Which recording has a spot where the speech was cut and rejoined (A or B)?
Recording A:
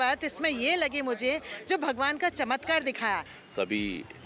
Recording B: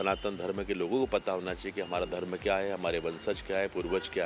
A